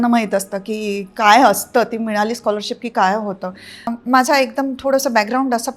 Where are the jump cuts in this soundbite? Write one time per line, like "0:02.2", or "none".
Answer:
0:03.9